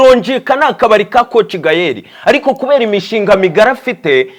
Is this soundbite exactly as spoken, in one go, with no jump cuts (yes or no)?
yes